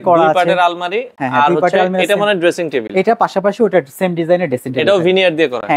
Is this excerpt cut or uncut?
uncut